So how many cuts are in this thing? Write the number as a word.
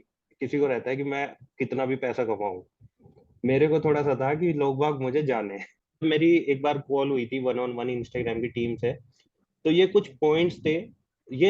one